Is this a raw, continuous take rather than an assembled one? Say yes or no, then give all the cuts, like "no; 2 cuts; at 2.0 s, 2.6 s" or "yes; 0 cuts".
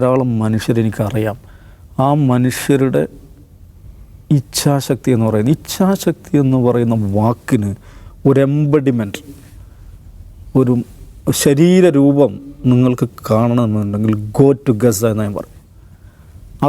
yes; 0 cuts